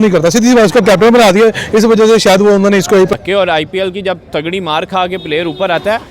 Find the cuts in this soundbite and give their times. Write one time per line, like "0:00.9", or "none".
0:03.1

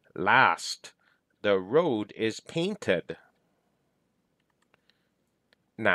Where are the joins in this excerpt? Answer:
0:04.3

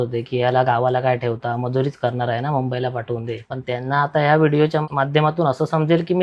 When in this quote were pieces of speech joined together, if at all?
0:03.5
0:04.8

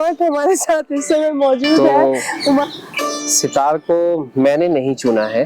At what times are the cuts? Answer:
0:02.6

